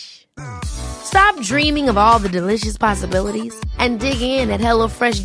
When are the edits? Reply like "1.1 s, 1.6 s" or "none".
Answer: none